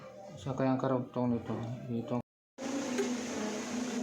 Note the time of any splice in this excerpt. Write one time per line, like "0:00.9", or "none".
0:02.2